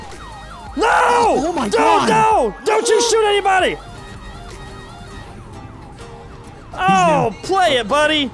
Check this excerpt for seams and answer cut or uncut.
cut